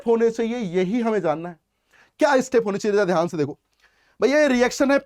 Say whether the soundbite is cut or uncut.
uncut